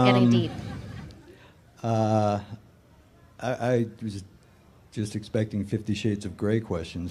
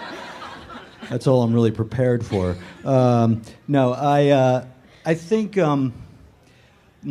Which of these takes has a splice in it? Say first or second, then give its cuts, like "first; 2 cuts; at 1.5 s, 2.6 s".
second; 1 cut; at 3.8 s